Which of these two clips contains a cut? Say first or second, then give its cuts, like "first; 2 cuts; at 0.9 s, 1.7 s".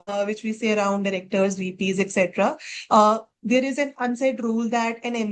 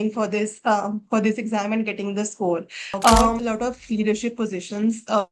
second; 1 cut; at 3.4 s